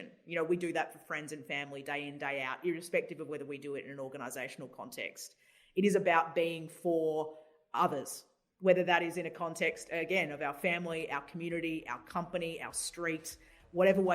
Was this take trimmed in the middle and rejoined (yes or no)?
no